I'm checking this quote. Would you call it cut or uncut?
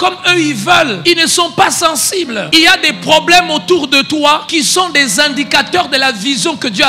cut